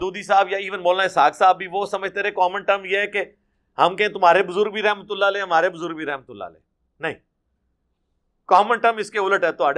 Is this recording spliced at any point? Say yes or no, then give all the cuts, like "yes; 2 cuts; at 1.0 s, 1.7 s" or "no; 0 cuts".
no; 0 cuts